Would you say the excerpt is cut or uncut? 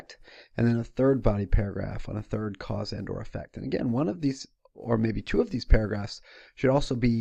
uncut